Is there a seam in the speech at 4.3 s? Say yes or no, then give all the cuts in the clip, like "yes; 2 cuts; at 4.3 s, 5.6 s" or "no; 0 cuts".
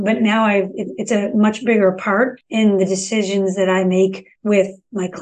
yes; 2 cuts; at 2.4 s, 4.3 s